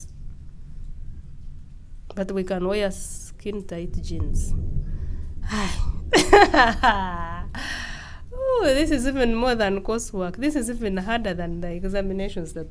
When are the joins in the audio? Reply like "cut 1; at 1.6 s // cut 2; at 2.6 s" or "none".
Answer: none